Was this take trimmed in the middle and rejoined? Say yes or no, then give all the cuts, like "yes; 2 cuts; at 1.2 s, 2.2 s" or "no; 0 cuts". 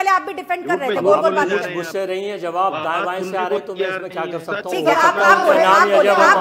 no; 0 cuts